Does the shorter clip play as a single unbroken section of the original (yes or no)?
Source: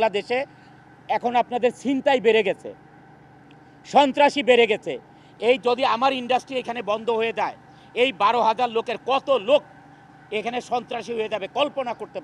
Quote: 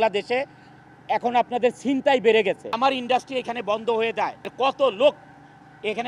no